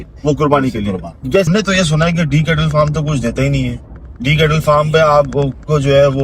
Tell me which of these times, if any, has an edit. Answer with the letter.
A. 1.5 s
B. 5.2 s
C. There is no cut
A